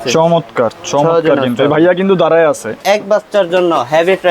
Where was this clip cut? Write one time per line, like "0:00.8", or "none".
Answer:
0:02.7